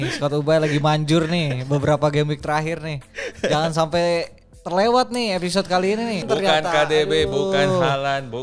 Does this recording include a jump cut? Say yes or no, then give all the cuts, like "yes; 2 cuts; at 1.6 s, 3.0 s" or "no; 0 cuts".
yes; 1 cut; at 6.2 s